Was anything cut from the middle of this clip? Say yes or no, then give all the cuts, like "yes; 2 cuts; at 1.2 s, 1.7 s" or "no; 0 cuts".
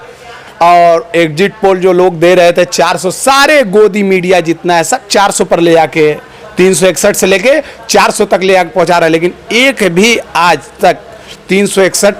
no; 0 cuts